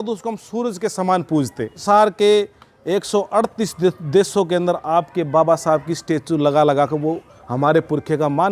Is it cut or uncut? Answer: cut